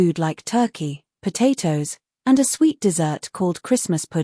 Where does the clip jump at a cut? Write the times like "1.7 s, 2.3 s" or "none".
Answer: 1.0 s